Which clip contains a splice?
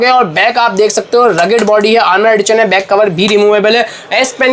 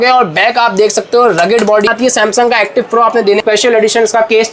second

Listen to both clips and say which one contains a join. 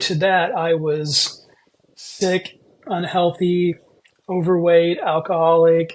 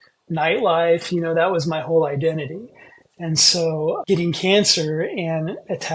second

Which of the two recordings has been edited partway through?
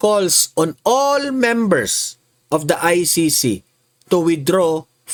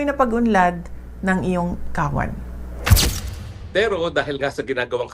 second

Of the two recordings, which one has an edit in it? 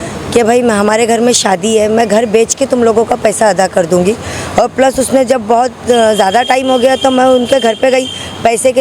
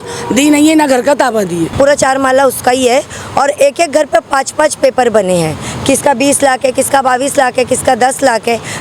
second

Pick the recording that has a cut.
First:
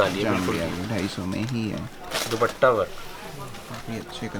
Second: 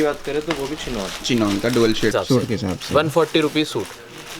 second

